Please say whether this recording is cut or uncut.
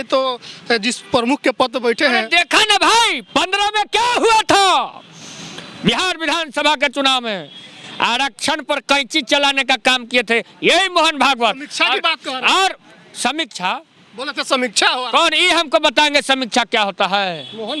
uncut